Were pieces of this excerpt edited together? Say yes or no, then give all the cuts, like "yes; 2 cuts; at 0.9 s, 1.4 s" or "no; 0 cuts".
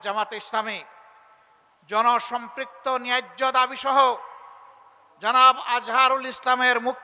no; 0 cuts